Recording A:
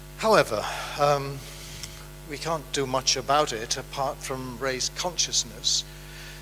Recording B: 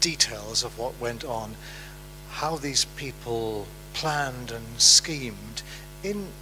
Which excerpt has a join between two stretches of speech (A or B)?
A